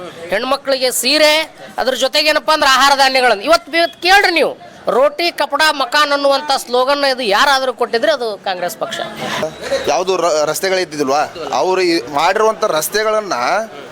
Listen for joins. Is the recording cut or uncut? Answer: cut